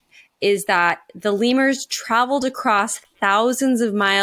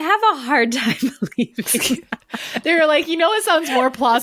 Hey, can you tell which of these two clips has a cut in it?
second; 1 cut; at 2.5 s

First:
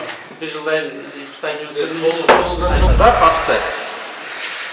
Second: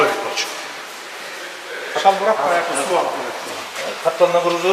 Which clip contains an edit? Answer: first; 1 cut; at 2.8 s

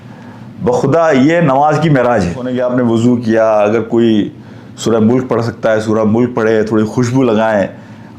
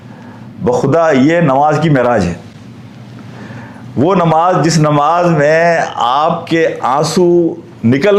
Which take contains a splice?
first; 1 cut; at 2.5 s

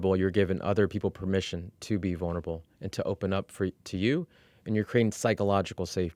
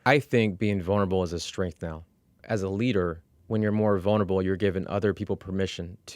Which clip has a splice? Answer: second; 2 cuts; at 2.4 s, 3.3 s

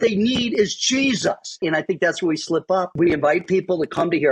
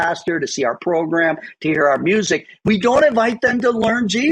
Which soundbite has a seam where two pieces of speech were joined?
first; 2 cuts; at 1.5 s, 2.9 s

